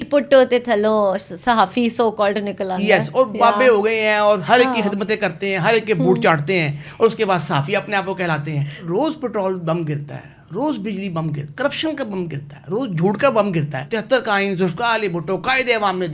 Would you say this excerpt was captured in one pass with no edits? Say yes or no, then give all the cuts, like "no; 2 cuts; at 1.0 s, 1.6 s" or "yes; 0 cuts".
no; 3 cuts; at 8.8 s, 11.5 s, 13.8 s